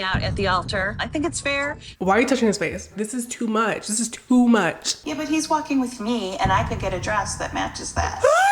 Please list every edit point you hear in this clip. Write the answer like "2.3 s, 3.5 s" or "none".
1.8 s, 4.9 s